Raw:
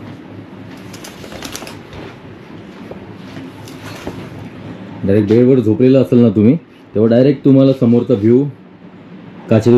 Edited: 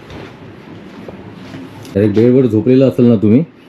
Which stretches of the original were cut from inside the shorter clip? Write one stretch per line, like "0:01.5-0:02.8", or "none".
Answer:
0:03.8-0:05.1